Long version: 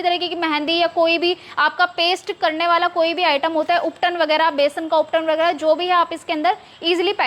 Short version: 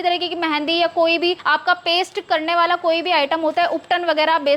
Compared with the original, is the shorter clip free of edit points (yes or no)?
no